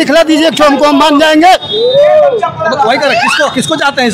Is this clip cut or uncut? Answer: uncut